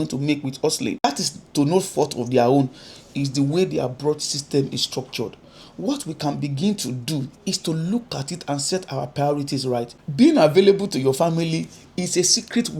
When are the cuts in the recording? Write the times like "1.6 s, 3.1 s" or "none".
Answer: 1.0 s, 10.0 s